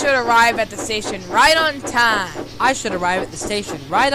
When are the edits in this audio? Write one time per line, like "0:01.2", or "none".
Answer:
none